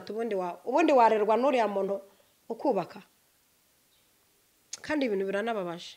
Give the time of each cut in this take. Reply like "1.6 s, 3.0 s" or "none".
none